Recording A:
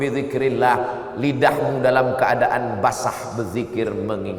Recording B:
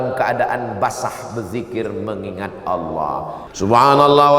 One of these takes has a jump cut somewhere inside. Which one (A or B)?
B